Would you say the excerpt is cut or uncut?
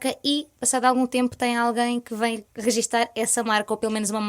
cut